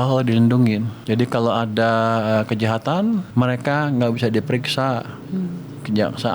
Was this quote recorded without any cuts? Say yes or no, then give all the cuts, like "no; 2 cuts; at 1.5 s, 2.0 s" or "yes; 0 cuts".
no; 2 cuts; at 1.0 s, 3.3 s